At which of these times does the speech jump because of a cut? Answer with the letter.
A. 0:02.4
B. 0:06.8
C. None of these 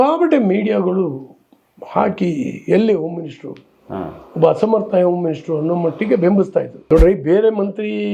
B